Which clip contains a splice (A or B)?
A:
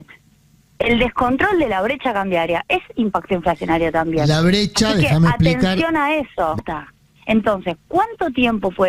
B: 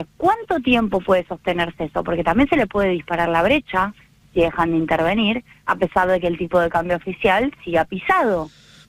A